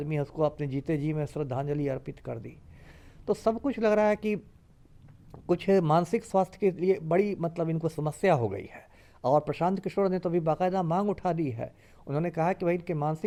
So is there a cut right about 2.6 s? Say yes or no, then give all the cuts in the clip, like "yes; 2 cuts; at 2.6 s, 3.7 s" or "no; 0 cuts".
no; 0 cuts